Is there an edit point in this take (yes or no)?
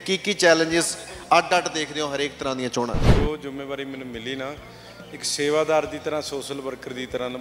yes